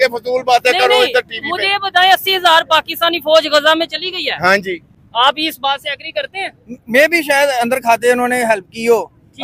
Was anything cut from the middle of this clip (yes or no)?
no